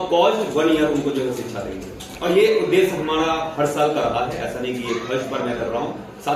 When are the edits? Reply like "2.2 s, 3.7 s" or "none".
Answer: none